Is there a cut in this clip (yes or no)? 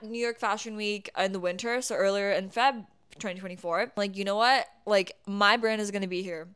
yes